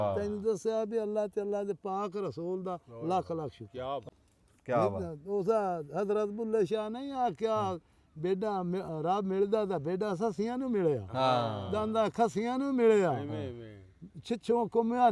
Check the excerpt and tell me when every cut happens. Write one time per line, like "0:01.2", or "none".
0:04.0